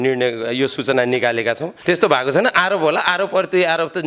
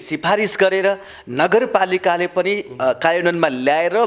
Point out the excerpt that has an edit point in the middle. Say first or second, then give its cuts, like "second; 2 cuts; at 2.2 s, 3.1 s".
first; 1 cut; at 1.7 s